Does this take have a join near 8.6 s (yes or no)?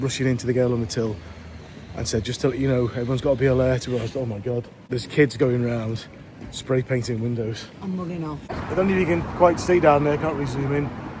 yes